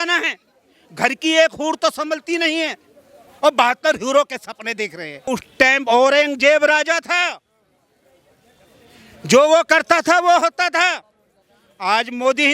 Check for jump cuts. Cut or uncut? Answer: cut